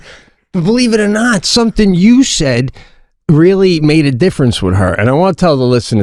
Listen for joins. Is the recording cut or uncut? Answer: uncut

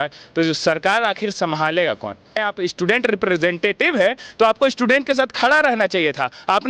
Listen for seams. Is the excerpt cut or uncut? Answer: cut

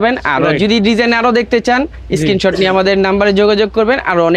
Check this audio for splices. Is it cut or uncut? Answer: uncut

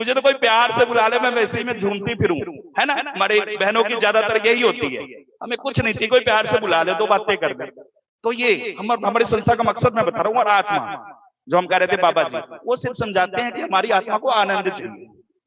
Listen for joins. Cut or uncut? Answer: uncut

